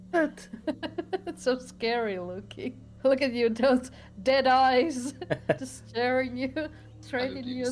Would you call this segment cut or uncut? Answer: cut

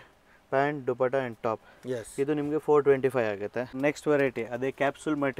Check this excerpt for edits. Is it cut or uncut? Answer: cut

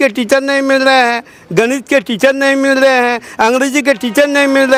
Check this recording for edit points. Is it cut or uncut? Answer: uncut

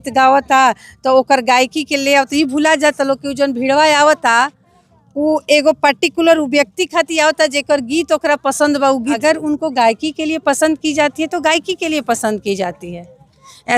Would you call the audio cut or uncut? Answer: cut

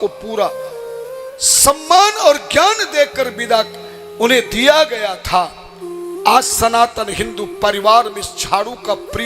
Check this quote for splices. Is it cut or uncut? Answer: uncut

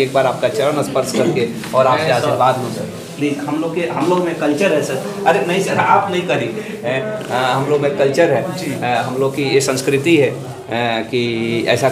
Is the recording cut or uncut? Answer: uncut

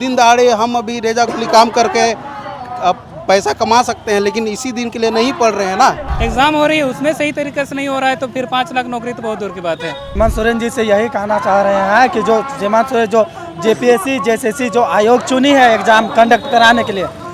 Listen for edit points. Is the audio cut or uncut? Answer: cut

